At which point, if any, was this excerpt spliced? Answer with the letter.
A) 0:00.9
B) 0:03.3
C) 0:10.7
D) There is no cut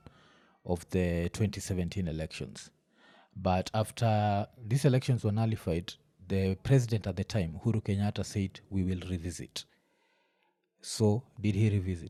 D